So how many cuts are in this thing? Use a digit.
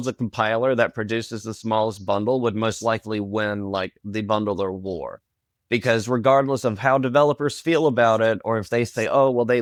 0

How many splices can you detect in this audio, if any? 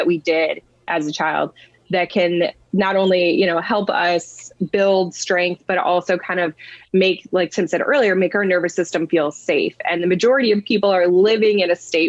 0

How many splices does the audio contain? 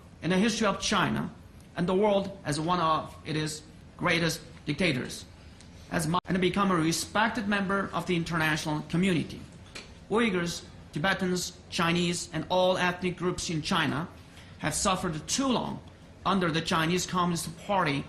0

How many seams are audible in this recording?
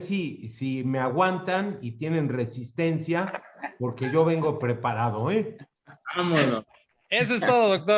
0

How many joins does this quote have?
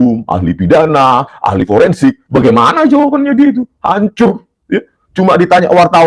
0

